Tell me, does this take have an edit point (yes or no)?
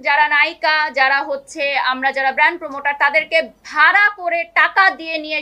no